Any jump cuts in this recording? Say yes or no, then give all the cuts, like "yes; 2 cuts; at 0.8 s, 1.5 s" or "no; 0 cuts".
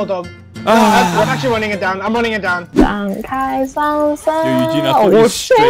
yes; 1 cut; at 2.7 s